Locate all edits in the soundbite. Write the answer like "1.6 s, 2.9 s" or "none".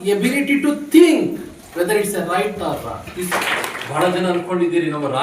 3.3 s